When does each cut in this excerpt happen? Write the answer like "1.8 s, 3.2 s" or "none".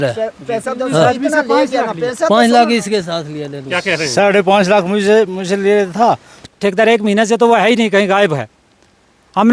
6.5 s

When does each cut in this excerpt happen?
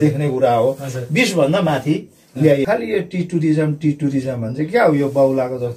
2.6 s

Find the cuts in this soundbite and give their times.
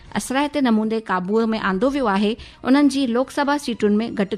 none

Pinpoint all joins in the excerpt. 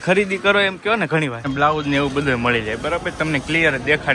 1.4 s

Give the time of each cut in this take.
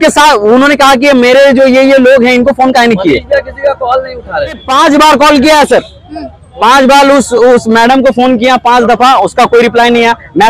4.6 s

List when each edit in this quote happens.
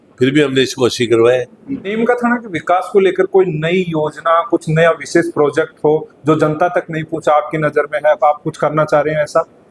1.9 s

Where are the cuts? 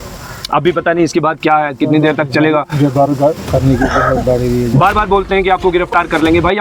none

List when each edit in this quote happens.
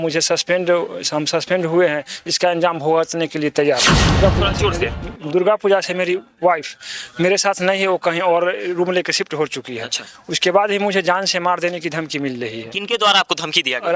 4.2 s

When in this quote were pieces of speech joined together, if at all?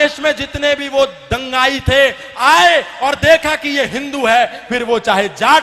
none

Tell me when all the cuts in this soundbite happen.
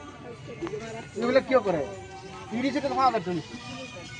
none

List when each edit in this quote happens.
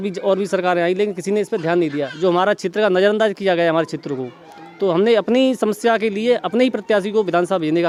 none

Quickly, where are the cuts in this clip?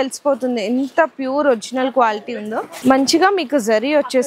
2.7 s

